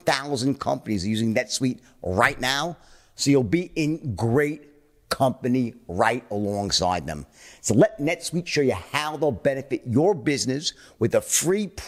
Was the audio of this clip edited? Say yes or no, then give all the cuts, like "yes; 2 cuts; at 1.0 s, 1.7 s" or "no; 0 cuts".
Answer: no; 0 cuts